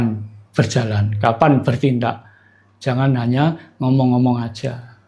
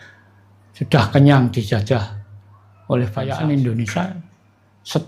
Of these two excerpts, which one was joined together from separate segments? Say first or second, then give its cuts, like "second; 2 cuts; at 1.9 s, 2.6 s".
second; 1 cut; at 3.2 s